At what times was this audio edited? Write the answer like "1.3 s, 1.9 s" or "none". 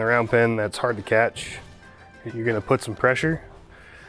2.2 s